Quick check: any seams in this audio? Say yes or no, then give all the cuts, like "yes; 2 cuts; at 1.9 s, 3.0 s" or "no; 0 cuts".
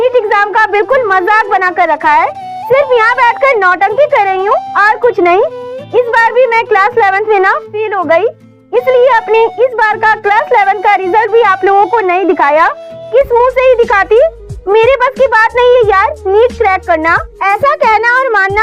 no; 0 cuts